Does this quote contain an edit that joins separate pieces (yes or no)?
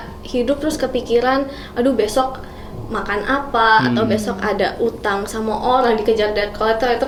no